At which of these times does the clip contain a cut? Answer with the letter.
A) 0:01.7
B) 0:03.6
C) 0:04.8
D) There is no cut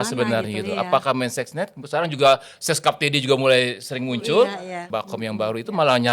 C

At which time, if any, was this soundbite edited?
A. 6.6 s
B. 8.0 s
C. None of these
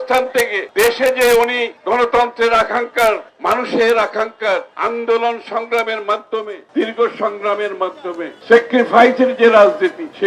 C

